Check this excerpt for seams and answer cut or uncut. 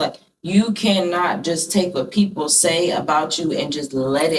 uncut